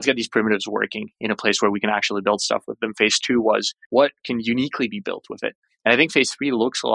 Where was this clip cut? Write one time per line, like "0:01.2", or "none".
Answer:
0:03.8

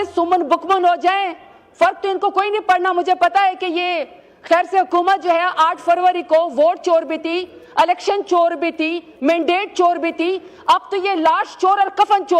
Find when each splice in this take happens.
none

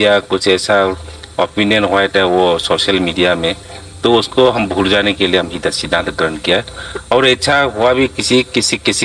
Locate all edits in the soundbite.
none

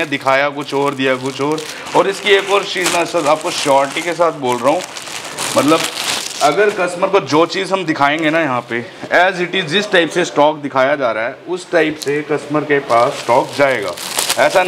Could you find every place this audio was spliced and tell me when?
none

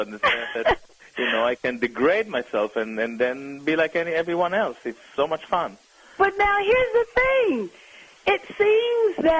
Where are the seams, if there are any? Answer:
none

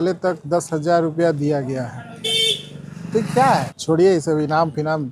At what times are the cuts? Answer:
0:03.7

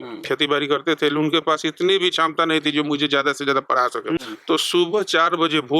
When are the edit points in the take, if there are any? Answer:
0:04.2

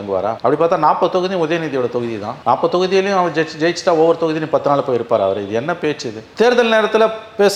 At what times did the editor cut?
none

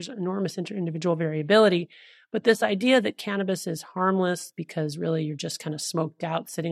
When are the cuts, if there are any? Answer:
none

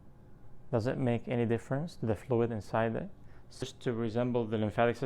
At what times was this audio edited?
0:03.6

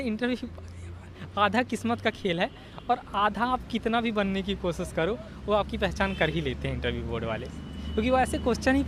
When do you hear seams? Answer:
none

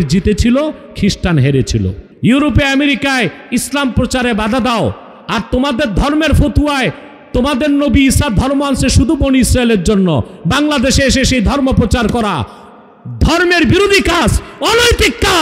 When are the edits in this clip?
0:02.0

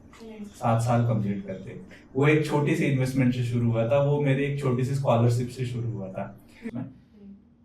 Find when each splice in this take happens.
0:06.7

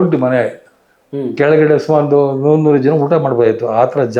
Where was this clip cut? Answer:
none

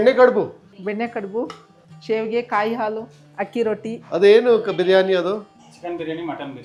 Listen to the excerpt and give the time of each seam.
none

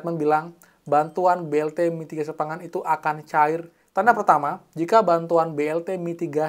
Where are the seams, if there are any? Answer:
0:03.8

